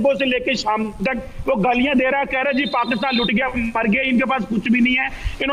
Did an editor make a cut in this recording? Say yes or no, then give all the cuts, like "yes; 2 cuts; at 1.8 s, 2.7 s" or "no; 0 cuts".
no; 0 cuts